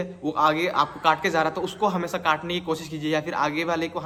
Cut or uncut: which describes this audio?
uncut